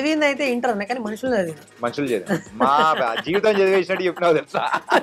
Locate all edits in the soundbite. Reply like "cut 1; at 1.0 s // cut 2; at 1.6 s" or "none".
cut 1; at 1.6 s

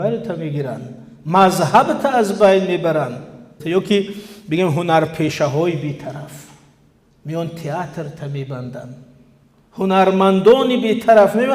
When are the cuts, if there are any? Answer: cut 1; at 3.6 s

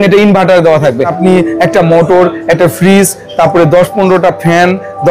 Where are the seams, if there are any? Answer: cut 1; at 1.1 s

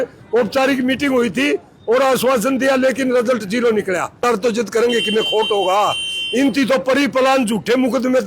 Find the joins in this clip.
cut 1; at 4.1 s

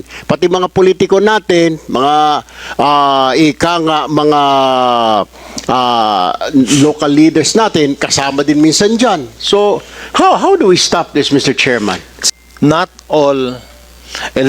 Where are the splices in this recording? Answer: cut 1; at 12.1 s

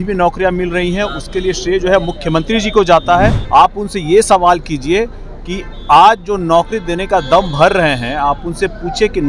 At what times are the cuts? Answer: cut 1; at 3.4 s

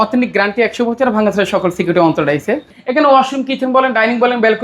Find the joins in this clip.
cut 1; at 2.7 s

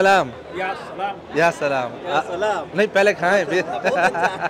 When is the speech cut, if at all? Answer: none

